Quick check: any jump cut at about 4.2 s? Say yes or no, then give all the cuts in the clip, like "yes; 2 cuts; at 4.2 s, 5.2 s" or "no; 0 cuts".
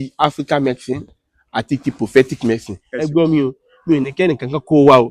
no; 1 cut; at 2.9 s